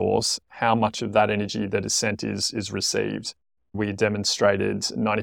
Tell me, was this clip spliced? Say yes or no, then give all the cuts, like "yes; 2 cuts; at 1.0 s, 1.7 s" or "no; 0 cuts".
yes; 1 cut; at 3.8 s